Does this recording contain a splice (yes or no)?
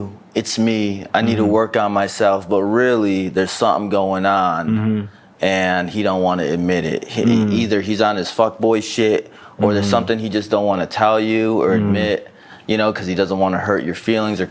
no